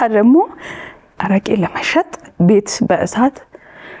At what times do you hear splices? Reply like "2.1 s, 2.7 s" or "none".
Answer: 2.3 s